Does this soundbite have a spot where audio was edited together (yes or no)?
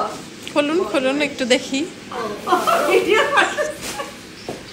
no